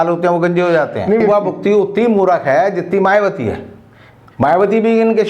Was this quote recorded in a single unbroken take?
no; 1 cut; at 1.2 s

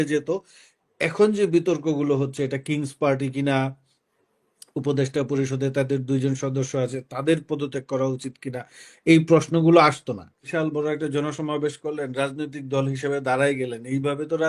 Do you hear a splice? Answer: yes; 1 cut; at 10.4 s

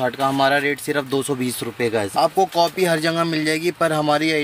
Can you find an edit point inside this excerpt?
yes; 1 cut; at 2.1 s

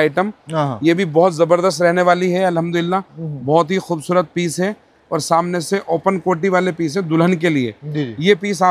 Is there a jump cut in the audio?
no; 0 cuts

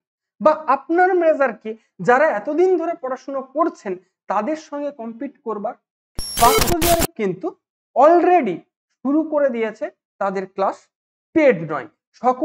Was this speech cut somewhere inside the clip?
yes; 1 cut; at 6.2 s

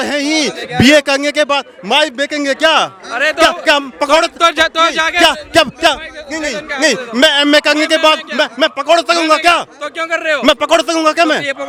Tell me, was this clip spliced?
no; 0 cuts

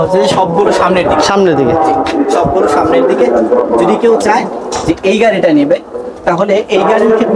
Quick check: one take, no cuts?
yes; 0 cuts

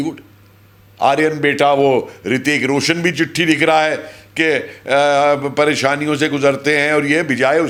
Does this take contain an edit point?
no; 0 cuts

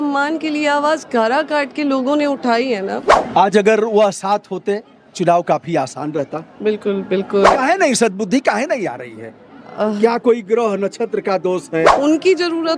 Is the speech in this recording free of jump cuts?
no; 3 cuts; at 3.1 s, 7.5 s, 11.9 s

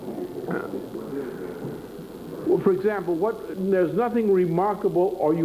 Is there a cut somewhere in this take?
yes; 1 cut; at 3.8 s

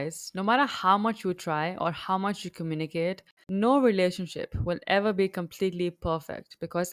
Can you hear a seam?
yes; 1 cut; at 3.4 s

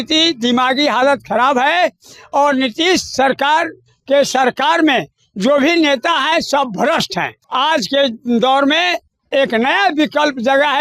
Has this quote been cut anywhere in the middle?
yes; 1 cut; at 7.4 s

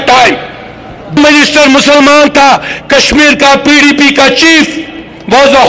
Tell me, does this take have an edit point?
yes; 1 cut; at 1.2 s

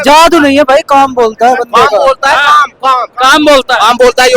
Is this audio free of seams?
yes; 0 cuts

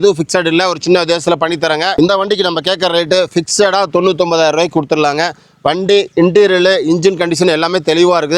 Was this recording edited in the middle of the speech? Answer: yes; 1 cut; at 1.9 s

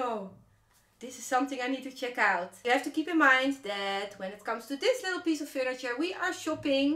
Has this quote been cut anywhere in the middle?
yes; 1 cut; at 2.6 s

